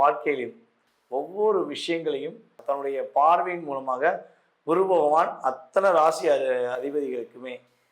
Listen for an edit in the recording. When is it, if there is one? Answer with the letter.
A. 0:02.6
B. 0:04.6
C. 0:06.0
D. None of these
A